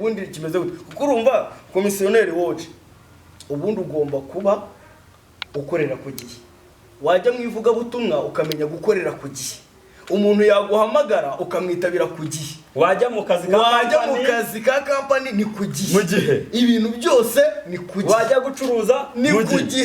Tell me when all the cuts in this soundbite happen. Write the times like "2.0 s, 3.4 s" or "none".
none